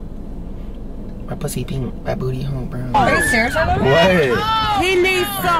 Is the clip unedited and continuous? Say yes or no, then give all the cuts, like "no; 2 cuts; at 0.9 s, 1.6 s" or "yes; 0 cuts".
yes; 0 cuts